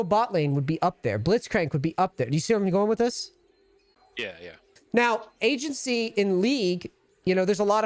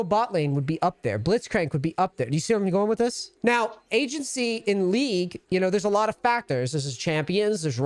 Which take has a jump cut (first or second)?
second